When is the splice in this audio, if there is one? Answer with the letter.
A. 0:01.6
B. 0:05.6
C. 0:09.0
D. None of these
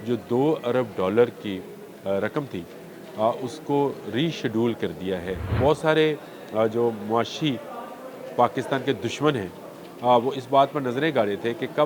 B